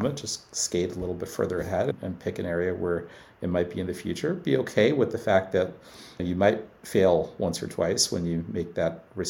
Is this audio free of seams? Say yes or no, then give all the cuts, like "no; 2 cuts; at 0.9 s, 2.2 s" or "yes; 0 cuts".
no; 2 cuts; at 1.9 s, 6.2 s